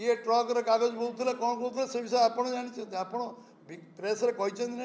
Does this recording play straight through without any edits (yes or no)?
yes